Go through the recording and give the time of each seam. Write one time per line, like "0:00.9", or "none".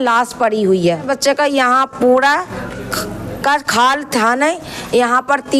0:01.0